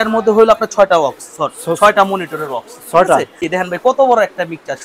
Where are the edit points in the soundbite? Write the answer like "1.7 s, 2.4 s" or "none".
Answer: 3.5 s